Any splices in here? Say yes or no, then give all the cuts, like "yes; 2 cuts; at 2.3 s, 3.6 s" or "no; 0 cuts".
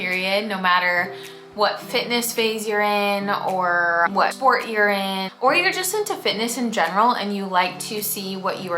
yes; 2 cuts; at 4.1 s, 5.3 s